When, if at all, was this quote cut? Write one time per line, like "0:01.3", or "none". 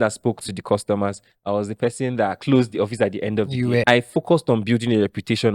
0:03.8